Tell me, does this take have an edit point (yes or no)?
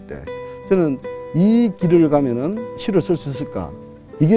yes